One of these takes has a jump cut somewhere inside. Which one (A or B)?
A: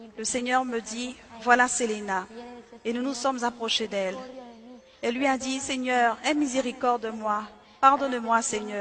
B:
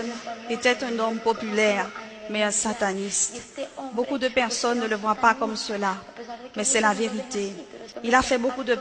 B